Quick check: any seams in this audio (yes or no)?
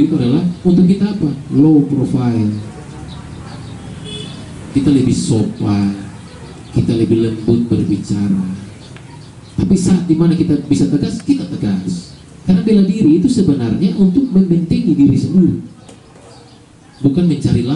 no